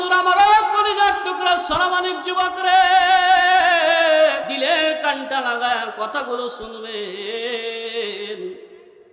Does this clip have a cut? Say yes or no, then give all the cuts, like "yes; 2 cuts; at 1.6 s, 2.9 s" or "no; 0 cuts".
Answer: yes; 1 cut; at 4.5 s